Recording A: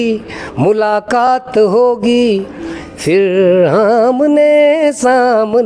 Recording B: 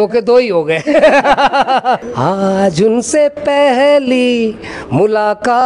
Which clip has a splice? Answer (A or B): B